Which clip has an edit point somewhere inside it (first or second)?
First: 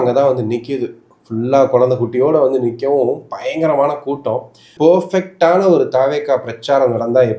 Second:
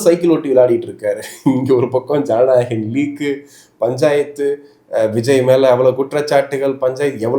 first